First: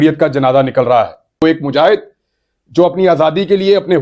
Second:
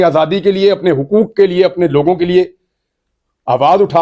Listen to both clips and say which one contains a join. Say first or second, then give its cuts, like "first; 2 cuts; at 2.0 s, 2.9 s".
first; 1 cut; at 1.4 s